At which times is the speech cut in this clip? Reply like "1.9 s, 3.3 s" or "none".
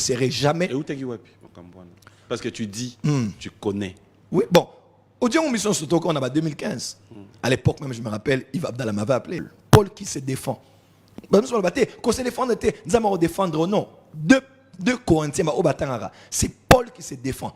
9.5 s